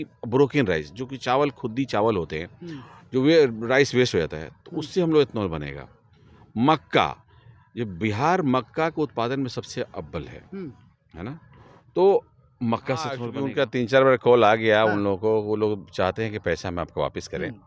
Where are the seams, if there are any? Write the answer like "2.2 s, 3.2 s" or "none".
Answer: 13.3 s